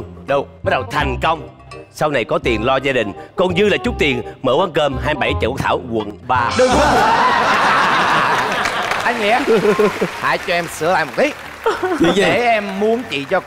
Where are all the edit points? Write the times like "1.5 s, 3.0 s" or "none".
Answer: 9.0 s